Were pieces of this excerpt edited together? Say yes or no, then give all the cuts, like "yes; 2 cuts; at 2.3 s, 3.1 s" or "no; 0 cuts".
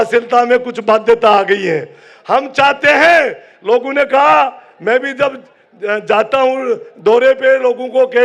no; 0 cuts